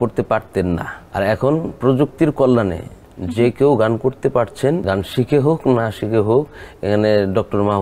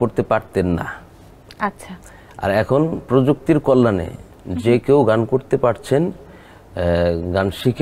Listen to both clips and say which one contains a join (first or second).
first